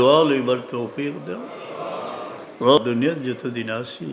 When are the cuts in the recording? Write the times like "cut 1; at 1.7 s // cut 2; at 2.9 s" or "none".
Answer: cut 1; at 2.8 s